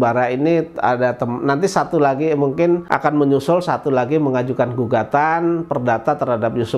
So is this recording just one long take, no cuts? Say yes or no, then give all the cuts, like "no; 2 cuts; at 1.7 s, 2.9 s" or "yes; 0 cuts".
no; 1 cut; at 2.9 s